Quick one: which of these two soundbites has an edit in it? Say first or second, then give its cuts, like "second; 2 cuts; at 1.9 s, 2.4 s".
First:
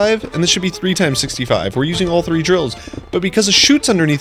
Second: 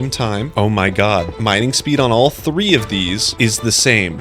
second; 2 cuts; at 1.3 s, 3.3 s